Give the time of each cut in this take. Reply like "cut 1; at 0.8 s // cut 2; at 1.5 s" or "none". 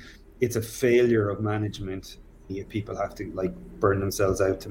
cut 1; at 2.5 s